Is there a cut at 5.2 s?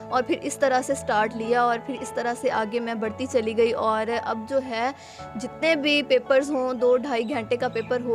no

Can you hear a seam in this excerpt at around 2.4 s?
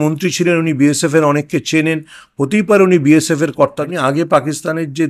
no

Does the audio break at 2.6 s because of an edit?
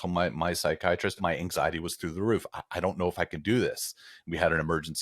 no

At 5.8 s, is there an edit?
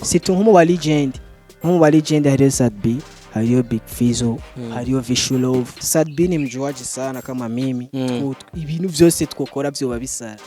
yes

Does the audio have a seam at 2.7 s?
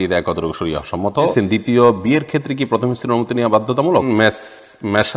no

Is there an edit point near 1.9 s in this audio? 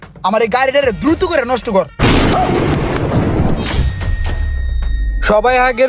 no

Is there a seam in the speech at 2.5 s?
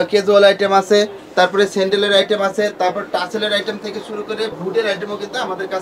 no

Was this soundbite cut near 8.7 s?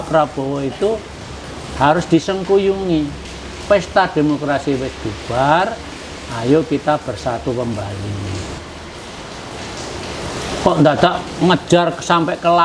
yes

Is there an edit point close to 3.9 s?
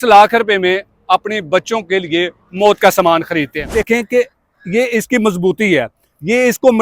yes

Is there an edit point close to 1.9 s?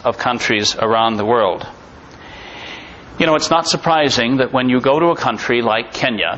no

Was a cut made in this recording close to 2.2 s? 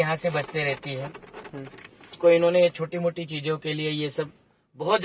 yes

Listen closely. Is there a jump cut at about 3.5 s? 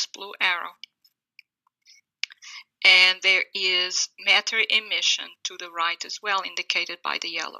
yes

